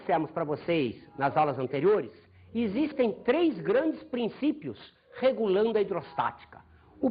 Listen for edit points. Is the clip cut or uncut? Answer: cut